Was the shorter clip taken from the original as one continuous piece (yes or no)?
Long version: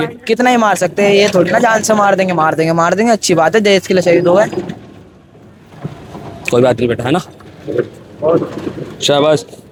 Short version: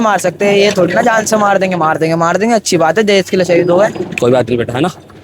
no